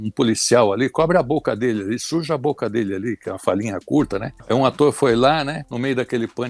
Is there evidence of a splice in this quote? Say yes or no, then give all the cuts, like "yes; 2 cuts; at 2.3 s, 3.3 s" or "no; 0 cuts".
no; 0 cuts